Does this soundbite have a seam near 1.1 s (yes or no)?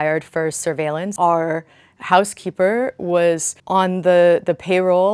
yes